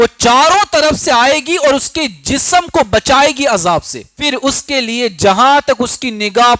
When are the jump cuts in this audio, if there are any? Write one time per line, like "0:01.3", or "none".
0:04.2